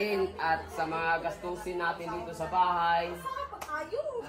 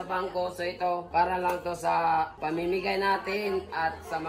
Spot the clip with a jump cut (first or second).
second